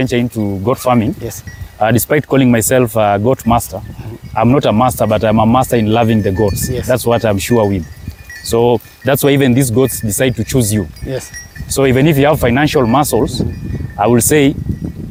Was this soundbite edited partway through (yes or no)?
no